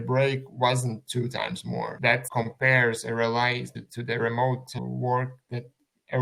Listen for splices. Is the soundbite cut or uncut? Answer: uncut